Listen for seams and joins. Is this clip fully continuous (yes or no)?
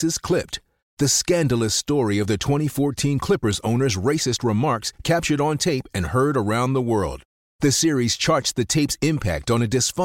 yes